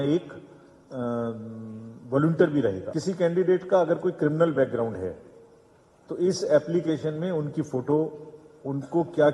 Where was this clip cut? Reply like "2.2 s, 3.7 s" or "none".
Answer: 2.9 s